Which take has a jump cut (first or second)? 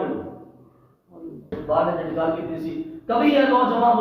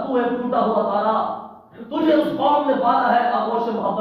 first